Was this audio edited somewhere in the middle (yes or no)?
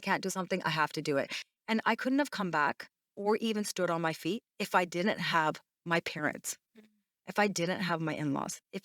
yes